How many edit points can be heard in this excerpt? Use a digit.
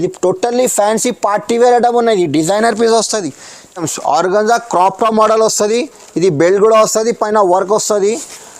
1